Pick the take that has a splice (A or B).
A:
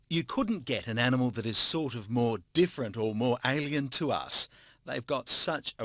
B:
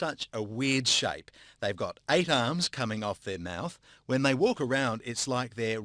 B